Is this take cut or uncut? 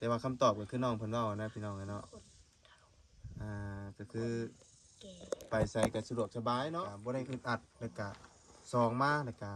cut